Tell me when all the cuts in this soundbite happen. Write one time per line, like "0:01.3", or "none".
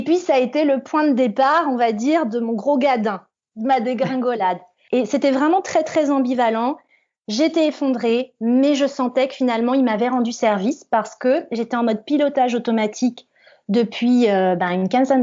0:04.7